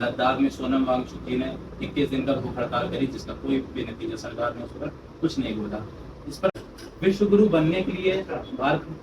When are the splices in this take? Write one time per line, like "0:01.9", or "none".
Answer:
0:06.6